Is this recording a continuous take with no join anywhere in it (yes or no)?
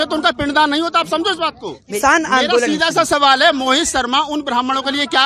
no